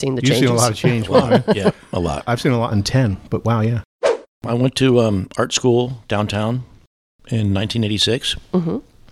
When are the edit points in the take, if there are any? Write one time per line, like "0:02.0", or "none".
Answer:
0:04.4